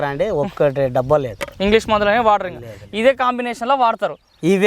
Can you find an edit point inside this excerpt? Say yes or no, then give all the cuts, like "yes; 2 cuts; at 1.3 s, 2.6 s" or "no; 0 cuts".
no; 0 cuts